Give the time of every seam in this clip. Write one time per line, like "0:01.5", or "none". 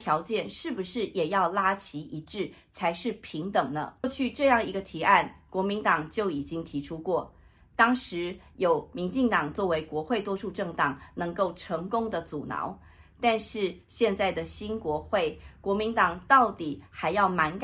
0:04.1